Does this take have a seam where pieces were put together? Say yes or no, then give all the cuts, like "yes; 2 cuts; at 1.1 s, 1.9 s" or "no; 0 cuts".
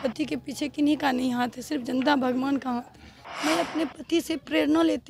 yes; 1 cut; at 3.2 s